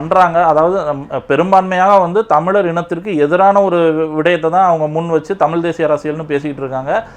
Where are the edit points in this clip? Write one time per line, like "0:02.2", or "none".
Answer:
none